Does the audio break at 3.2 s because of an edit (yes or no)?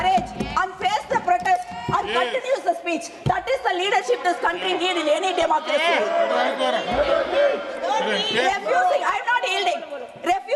no